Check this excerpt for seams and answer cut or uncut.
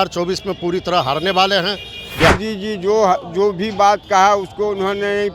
cut